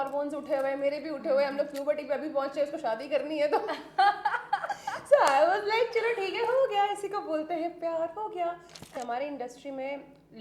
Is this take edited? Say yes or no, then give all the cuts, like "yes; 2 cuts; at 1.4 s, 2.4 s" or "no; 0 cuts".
yes; 1 cut; at 9.0 s